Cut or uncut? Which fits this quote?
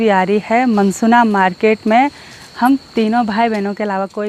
uncut